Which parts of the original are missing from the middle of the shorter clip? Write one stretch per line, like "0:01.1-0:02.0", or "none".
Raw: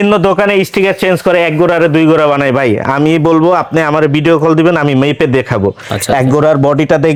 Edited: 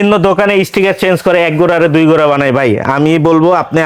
none